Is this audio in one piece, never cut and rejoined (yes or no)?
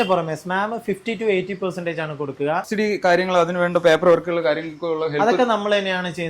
no